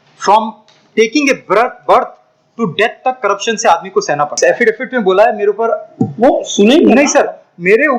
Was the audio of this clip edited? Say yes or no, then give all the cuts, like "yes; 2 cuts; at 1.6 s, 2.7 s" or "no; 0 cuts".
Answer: yes; 1 cut; at 4.4 s